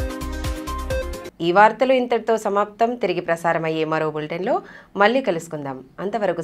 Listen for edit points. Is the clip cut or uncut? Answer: uncut